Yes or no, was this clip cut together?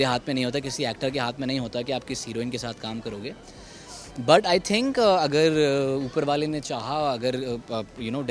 no